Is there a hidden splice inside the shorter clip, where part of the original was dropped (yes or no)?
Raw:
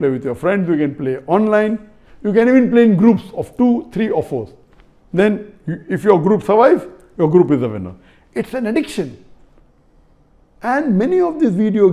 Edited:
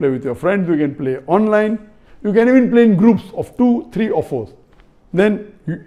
no